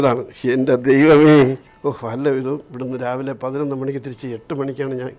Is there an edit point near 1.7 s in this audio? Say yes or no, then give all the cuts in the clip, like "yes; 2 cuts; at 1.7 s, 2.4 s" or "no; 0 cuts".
yes; 1 cut; at 1.7 s